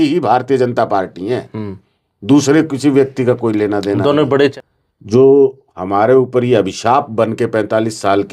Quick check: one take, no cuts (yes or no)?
no